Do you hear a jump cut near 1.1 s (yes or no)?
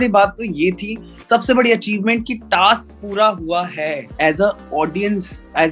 no